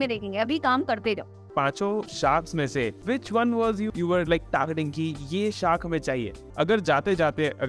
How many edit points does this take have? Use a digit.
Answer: 4